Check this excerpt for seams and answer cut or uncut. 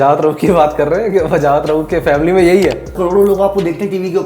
cut